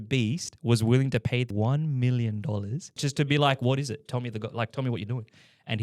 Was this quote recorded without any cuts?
no; 2 cuts; at 1.5 s, 3.0 s

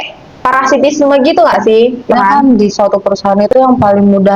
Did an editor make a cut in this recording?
yes; 1 cut; at 2.1 s

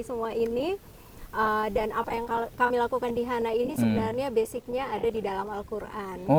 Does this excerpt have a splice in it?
no; 0 cuts

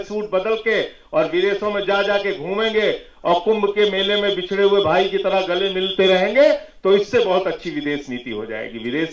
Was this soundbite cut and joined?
no; 0 cuts

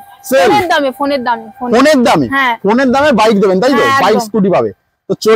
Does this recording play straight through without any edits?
yes; 0 cuts

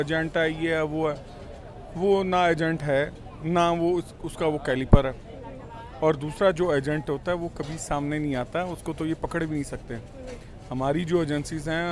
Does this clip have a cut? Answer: no; 0 cuts

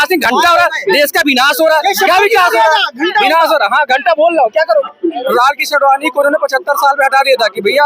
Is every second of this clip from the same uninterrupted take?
no; 1 cut; at 4.9 s

